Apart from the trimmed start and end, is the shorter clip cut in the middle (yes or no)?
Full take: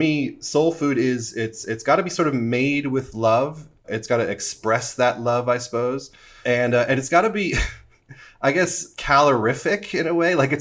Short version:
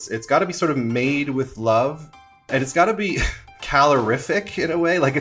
yes